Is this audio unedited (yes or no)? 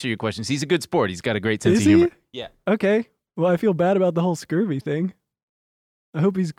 yes